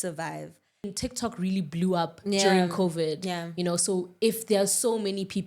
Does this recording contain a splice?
yes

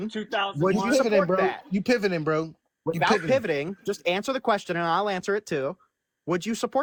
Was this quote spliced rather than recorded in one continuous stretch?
no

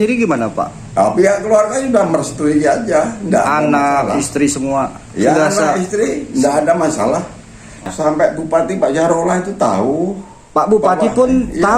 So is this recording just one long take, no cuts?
no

